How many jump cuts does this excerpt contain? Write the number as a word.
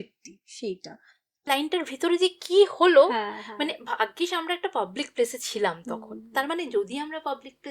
one